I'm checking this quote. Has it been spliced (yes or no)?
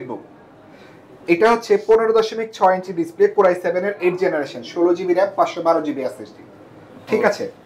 no